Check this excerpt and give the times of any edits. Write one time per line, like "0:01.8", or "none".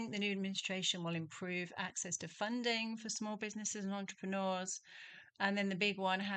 none